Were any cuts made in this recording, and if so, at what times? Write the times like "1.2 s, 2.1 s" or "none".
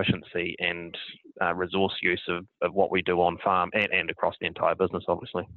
none